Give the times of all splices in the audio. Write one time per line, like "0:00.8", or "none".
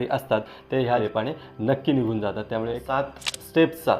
0:01.0
0:02.8